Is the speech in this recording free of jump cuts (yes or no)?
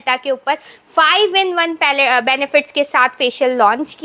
yes